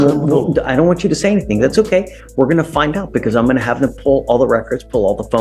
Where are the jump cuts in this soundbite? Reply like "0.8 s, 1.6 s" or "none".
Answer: none